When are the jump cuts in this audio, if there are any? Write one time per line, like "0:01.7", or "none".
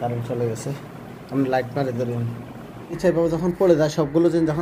0:03.0